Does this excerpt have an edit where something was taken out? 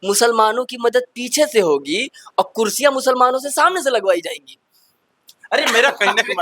no; 0 cuts

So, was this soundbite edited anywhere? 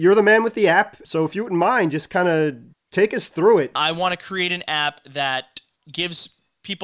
yes; 2 cuts; at 1.0 s, 3.8 s

